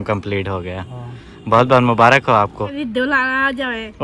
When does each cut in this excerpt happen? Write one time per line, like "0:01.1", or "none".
0:02.7